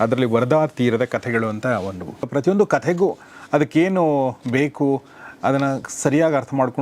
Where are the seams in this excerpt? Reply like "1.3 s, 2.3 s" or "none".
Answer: 2.3 s